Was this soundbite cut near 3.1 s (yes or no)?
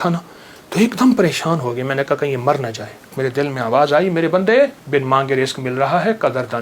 yes